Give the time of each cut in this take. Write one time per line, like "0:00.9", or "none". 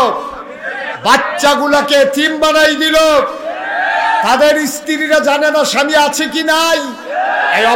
none